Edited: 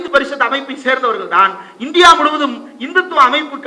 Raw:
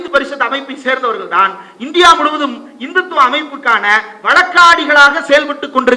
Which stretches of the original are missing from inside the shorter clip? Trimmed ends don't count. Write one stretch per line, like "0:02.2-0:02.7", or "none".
none

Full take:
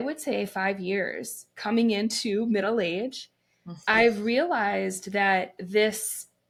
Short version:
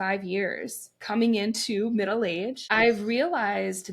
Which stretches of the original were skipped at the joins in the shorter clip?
0:03.2-0:03.8

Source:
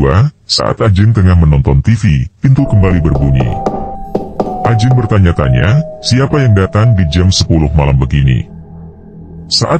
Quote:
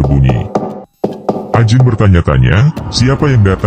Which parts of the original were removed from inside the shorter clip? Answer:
none

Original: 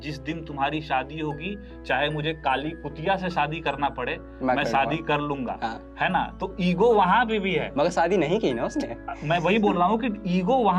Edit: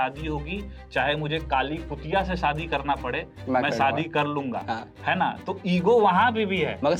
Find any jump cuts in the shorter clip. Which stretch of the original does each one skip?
none

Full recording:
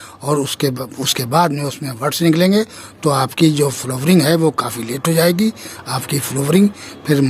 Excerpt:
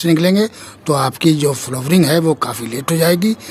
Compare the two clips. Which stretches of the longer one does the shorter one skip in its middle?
none

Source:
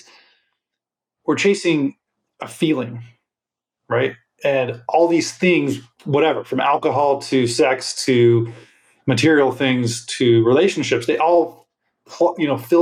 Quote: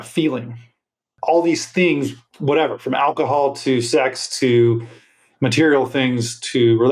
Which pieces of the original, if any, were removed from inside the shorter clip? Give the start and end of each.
0:03.6-0:04.8

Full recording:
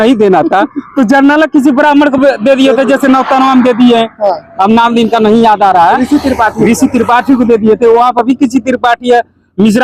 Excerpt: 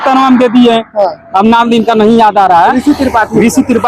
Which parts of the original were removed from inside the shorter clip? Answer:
none

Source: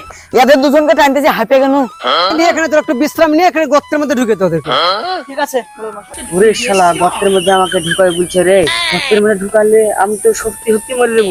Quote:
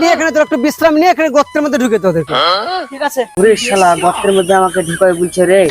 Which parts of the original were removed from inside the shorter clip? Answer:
0:05.7-0:06.3

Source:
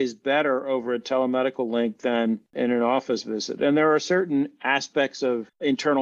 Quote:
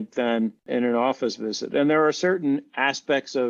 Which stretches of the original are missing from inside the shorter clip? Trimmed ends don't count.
none

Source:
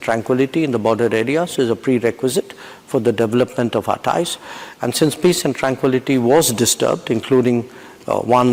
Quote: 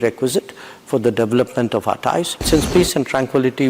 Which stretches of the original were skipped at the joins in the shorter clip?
0:04.4-0:04.9

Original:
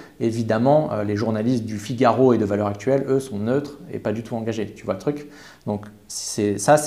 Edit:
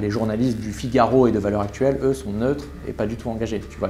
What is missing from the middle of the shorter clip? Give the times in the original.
none

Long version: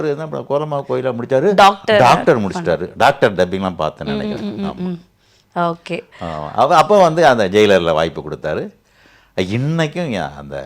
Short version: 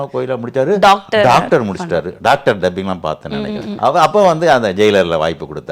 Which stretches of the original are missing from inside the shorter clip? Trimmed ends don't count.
0:04.5-0:06.5

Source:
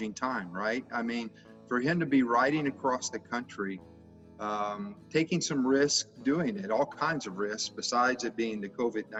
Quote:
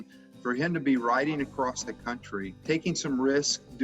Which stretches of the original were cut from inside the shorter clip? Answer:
0:03.8-0:05.0

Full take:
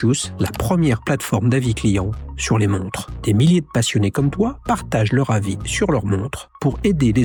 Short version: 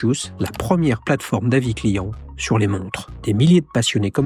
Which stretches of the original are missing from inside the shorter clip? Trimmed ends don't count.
none

